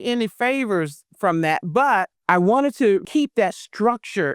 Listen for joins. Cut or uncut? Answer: cut